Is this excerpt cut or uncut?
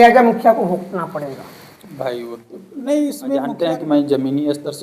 cut